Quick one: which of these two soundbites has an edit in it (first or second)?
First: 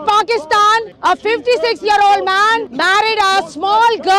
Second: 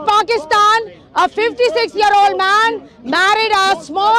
first